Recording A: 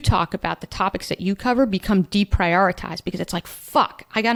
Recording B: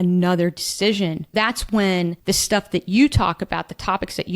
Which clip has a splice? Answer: B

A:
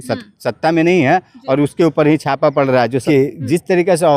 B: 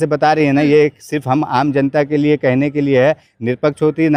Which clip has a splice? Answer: A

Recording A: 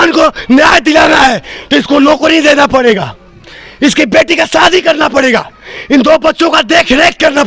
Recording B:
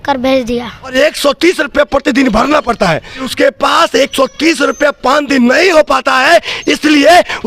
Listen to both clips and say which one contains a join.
B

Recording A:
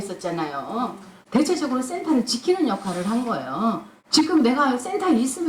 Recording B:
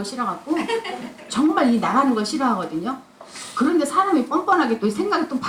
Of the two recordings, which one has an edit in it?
A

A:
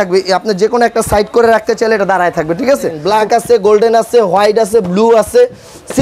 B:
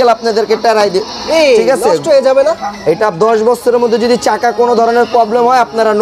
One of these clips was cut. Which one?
A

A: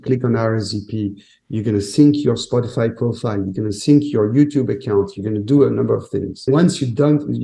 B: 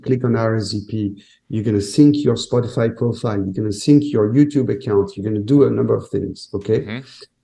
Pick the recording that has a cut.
A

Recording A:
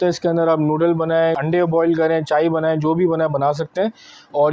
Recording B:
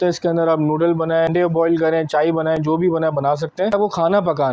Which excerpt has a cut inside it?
B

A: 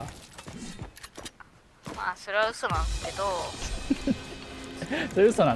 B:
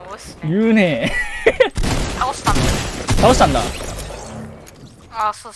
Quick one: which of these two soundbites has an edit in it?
B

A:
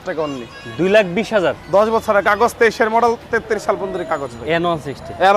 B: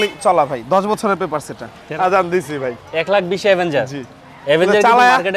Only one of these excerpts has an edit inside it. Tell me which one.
B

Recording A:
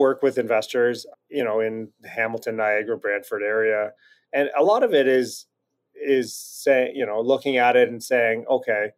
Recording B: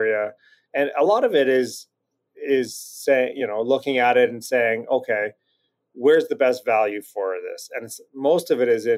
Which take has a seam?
A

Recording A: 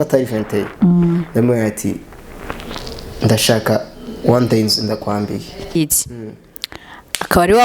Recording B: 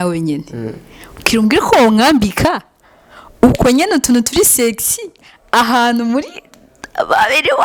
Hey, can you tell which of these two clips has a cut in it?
A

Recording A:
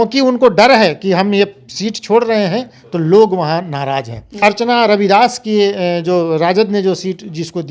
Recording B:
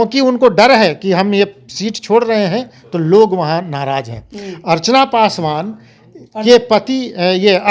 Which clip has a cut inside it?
A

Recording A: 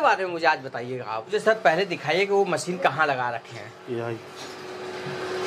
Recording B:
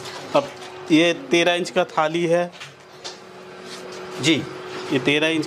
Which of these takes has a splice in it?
A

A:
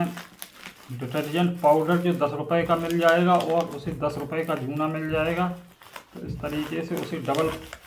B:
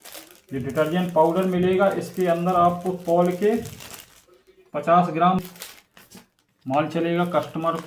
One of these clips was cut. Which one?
B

